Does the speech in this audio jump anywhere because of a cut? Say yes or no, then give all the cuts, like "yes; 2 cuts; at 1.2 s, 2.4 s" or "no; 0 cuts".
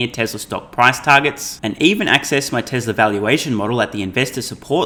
no; 0 cuts